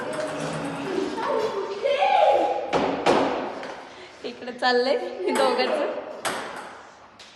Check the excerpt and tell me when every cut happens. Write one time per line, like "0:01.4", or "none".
none